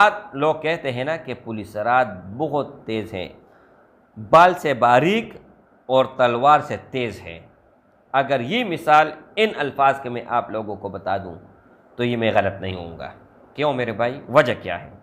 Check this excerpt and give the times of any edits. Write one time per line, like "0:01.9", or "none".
none

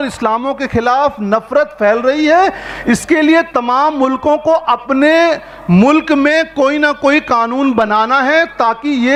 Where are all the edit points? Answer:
none

